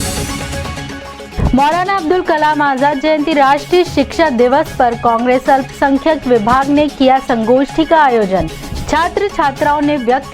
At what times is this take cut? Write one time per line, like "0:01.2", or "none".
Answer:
0:01.3